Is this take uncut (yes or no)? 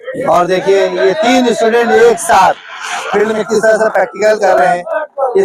yes